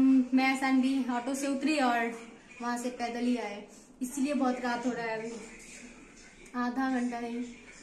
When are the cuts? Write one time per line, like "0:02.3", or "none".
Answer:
none

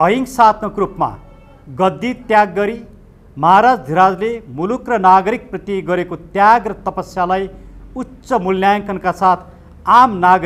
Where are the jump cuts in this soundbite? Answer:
none

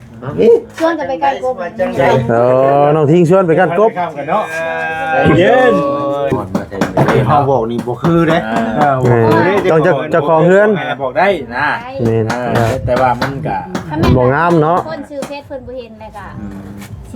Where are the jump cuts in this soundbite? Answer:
0:06.3

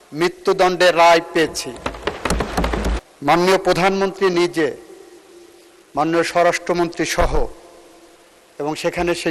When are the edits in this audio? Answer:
0:02.9

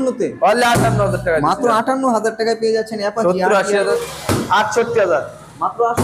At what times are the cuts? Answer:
0:03.9

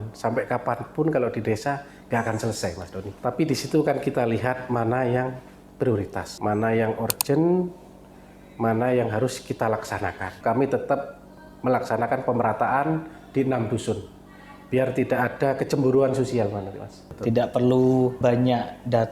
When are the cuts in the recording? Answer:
0:03.1
0:06.3
0:10.3
0:17.1
0:18.2

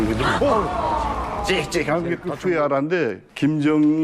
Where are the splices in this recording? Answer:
0:02.3

